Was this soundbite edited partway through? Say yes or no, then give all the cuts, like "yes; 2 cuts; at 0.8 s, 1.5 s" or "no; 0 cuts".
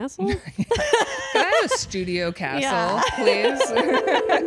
no; 0 cuts